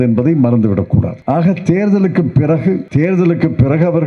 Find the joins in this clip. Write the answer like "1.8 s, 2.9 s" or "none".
1.1 s, 2.9 s

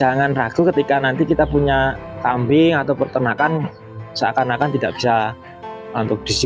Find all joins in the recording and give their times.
2.2 s

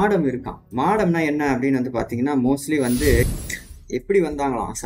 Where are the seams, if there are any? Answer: 3.2 s

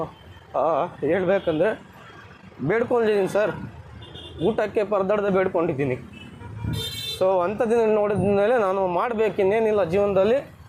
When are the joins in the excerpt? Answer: none

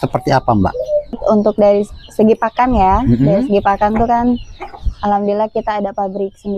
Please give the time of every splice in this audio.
1.1 s

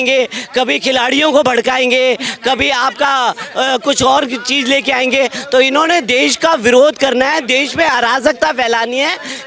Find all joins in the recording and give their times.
none

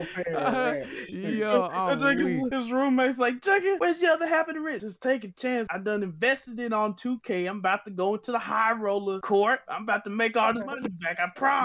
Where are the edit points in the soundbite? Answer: 2.5 s, 3.8 s, 4.8 s, 5.7 s, 9.2 s

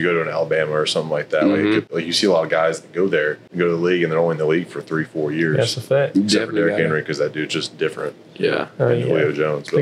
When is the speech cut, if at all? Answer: 1.9 s, 3.4 s

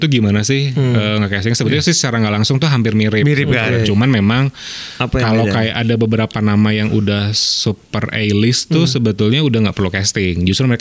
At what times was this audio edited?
none

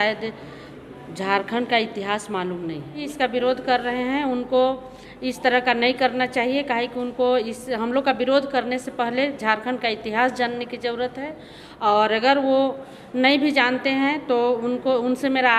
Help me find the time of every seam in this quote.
3.0 s

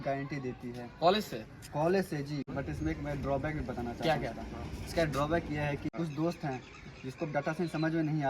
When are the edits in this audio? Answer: 2.5 s, 5.9 s

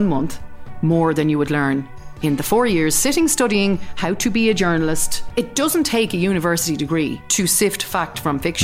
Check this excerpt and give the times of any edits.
5.2 s, 7.1 s

